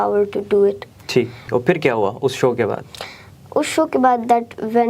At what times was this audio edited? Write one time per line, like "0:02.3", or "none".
0:01.5